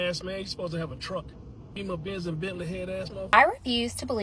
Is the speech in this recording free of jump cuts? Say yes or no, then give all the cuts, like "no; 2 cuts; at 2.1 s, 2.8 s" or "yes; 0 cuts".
no; 2 cuts; at 1.7 s, 3.2 s